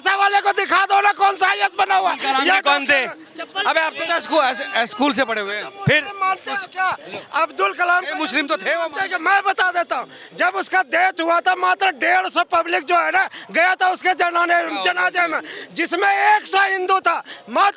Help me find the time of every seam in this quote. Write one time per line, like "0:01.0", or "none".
none

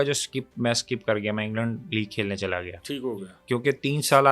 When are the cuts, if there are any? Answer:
none

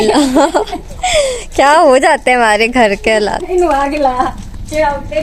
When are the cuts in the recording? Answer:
none

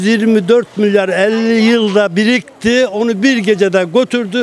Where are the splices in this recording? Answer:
none

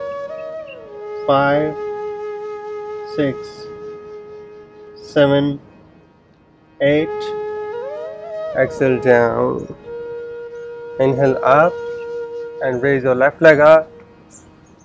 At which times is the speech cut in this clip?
0:07.1
0:08.5

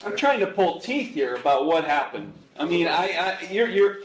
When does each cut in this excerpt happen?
none

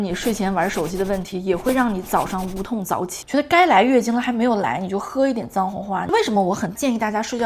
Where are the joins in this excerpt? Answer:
0:03.2
0:06.0

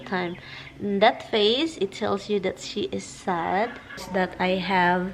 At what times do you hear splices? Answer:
0:04.0

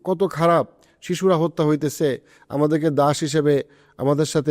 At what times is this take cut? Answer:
none

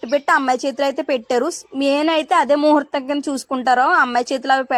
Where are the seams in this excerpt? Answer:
none

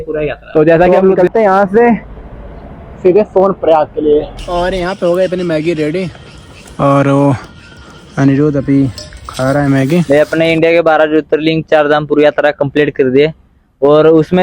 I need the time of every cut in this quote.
0:00.9
0:04.4
0:10.1

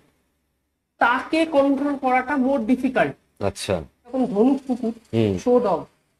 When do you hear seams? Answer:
0:04.1

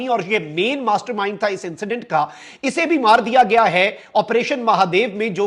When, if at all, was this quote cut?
none

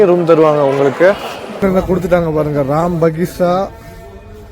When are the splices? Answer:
0:01.6

